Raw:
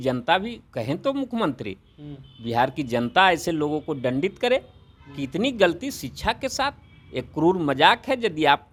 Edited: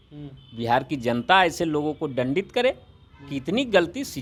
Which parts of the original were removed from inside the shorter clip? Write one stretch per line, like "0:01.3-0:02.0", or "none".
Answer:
none